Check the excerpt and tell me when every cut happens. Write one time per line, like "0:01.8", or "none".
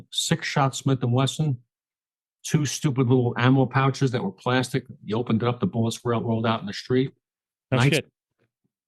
none